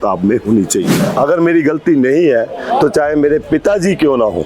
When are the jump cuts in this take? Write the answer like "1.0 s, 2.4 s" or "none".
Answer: 1.0 s